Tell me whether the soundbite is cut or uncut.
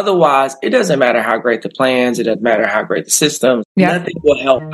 cut